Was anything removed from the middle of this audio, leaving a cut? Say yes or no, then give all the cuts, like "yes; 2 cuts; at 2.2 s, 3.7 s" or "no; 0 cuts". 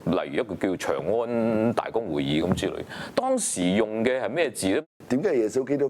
yes; 1 cut; at 4.8 s